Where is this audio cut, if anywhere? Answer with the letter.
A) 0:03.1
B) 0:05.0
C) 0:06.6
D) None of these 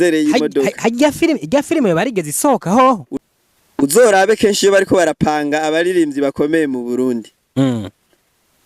A